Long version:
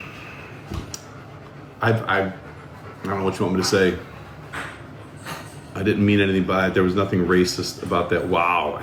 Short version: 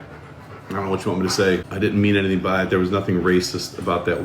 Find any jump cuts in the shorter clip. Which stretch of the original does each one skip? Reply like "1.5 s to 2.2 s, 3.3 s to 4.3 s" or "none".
4.0 s to 5.7 s